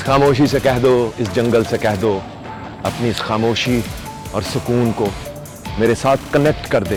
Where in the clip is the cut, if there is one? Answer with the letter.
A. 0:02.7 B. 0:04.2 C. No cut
C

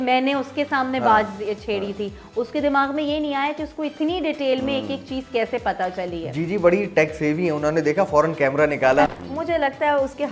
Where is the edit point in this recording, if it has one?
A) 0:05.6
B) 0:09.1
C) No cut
B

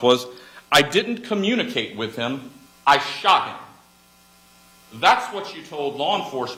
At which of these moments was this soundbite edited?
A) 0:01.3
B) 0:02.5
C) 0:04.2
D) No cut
D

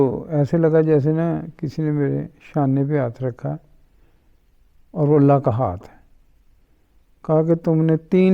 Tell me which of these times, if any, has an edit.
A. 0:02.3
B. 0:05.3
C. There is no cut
C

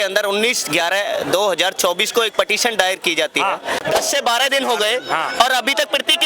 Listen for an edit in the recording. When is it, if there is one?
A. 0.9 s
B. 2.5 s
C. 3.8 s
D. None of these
C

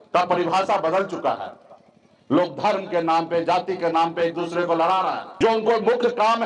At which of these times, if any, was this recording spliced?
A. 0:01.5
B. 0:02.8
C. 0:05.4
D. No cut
C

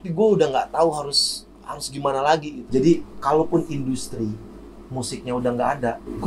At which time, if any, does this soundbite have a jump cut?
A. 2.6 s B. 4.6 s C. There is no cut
A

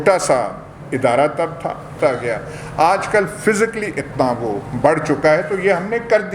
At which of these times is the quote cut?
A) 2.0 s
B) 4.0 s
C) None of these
A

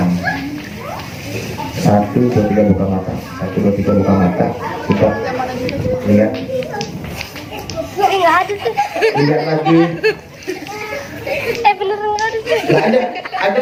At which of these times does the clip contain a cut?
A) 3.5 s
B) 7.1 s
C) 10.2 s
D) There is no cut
D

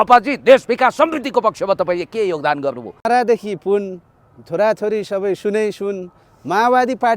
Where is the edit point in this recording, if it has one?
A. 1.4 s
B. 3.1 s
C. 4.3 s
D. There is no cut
B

